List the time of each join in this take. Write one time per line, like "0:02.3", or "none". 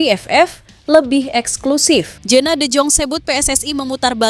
0:02.2